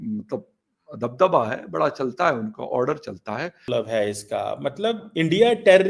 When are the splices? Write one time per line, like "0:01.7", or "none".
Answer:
0:03.7

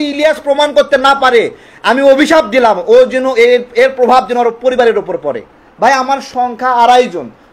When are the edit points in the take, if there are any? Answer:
0:05.5

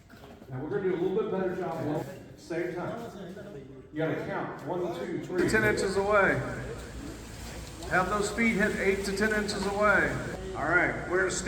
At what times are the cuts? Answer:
0:02.0
0:05.8
0:10.3

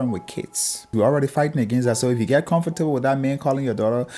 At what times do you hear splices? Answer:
0:00.9

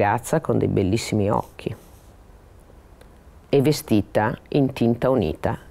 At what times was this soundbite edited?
none

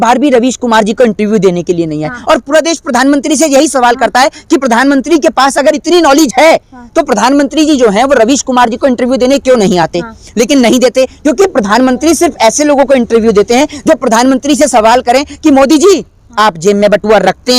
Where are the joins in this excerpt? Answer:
none

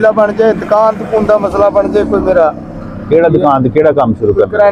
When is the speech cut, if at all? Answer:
none

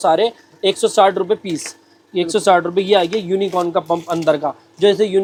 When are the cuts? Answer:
none

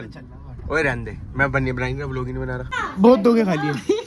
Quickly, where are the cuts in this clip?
0:02.8

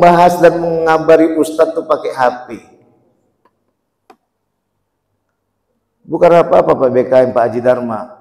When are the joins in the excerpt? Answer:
none

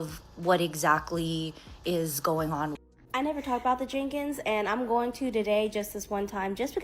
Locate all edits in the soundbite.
0:02.8

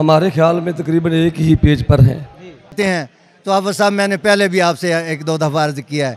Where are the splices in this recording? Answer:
0:02.7

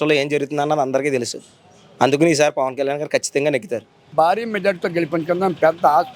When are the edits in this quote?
0:04.0

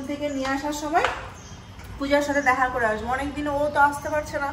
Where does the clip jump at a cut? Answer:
none

